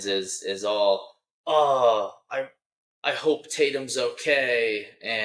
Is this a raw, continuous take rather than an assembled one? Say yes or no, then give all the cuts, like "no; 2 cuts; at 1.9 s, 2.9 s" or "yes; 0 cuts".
yes; 0 cuts